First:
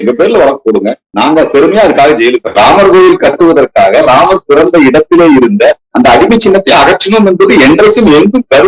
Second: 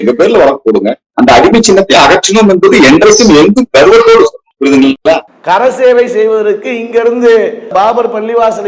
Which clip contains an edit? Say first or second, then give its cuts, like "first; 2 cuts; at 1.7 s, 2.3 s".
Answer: second; 2 cuts; at 1.1 s, 5.3 s